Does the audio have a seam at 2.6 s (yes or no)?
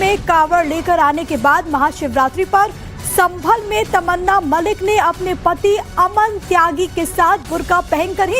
yes